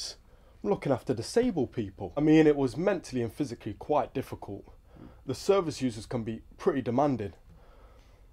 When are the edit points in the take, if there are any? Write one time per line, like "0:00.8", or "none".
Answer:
0:02.2